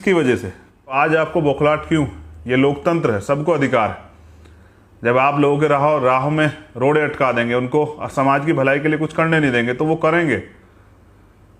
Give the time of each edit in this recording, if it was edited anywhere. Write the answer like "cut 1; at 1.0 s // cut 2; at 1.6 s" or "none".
cut 1; at 0.9 s